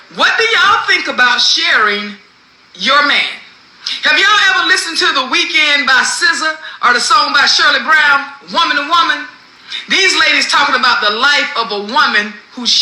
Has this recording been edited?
yes; 1 cut; at 10.7 s

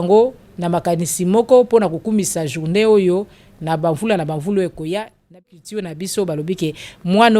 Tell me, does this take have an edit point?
yes; 1 cut; at 5.6 s

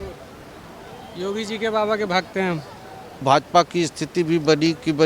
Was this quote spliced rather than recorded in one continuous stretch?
yes; 1 cut; at 3.2 s

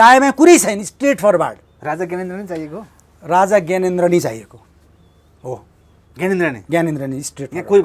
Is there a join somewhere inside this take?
no; 0 cuts

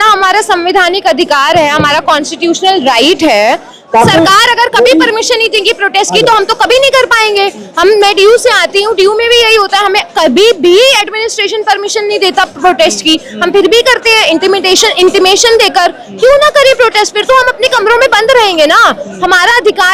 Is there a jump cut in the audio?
no; 0 cuts

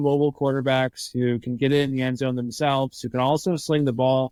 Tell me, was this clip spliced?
no; 0 cuts

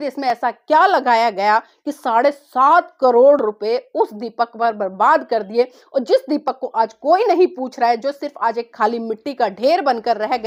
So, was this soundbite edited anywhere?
no; 0 cuts

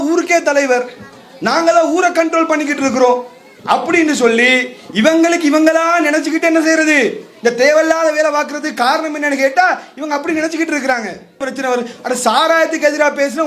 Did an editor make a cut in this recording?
yes; 1 cut; at 11.5 s

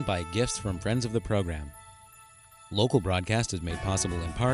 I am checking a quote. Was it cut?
no; 0 cuts

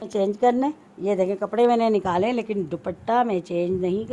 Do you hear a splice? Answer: no; 0 cuts

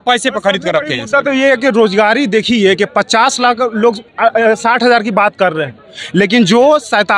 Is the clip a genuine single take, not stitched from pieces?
yes; 0 cuts

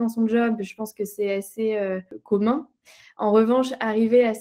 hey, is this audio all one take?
no; 1 cut; at 2.1 s

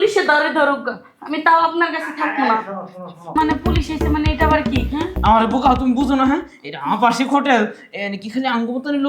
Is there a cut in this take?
yes; 1 cut; at 3.4 s

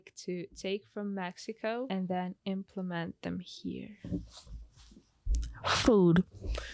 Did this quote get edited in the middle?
yes; 1 cut; at 1.9 s

